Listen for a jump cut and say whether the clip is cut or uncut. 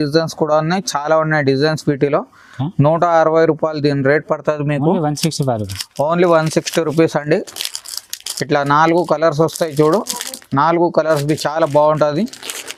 uncut